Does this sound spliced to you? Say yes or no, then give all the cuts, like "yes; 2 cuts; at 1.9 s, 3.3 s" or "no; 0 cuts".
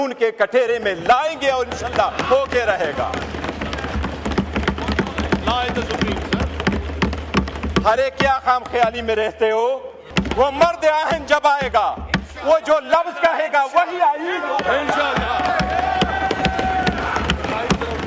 yes; 1 cut; at 10.1 s